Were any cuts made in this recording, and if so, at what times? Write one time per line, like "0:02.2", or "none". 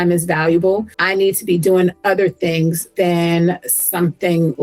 0:00.9
0:02.8